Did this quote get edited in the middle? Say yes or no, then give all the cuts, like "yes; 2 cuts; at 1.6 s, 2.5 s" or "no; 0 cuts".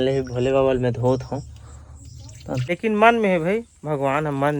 yes; 1 cut; at 2.6 s